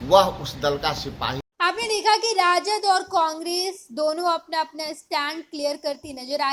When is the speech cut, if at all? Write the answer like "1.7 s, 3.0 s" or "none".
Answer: none